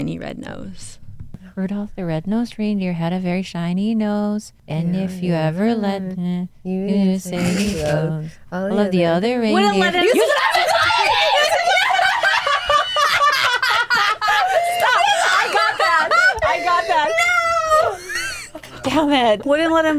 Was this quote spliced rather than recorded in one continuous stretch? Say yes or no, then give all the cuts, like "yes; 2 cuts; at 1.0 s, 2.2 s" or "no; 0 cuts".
yes; 2 cuts; at 1.4 s, 4.6 s